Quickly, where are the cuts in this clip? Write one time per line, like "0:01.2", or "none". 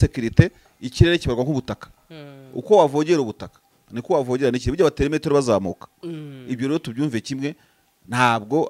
none